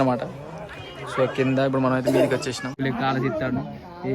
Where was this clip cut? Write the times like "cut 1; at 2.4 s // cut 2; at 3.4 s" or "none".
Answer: cut 1; at 2.7 s